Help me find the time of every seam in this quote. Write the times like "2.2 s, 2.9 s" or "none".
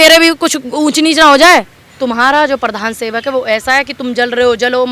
1.8 s